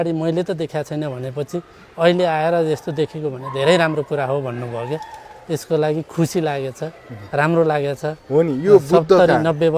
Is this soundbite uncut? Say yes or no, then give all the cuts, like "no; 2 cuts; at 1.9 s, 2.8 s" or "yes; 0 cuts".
yes; 0 cuts